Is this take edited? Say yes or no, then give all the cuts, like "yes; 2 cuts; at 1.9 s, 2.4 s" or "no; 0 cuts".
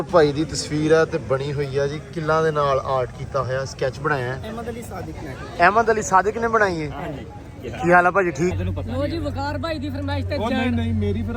yes; 1 cut; at 8.5 s